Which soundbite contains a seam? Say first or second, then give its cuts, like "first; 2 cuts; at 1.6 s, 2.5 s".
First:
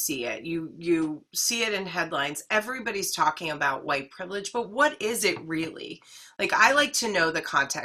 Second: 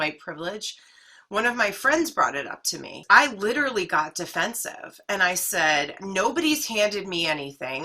second; 1 cut; at 3.0 s